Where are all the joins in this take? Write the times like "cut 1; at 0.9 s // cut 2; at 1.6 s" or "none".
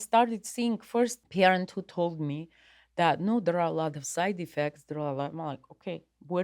cut 1; at 1.2 s